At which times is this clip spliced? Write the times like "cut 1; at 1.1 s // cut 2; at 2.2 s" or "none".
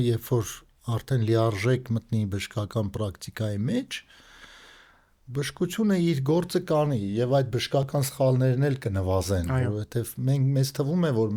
none

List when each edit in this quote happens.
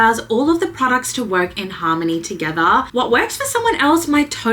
cut 1; at 2.9 s

